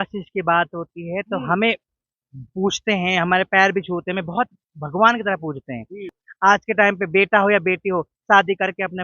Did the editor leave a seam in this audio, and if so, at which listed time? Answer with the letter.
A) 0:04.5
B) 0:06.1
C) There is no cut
B